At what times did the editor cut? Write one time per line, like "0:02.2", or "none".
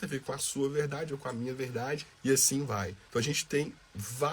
0:02.1
0:03.0